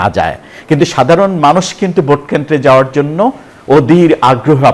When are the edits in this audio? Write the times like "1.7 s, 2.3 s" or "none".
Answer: none